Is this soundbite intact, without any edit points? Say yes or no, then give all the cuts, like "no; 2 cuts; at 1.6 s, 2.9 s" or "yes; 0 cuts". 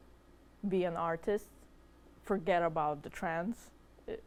yes; 0 cuts